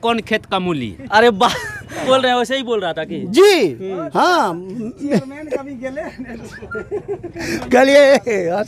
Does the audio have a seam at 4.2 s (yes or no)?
no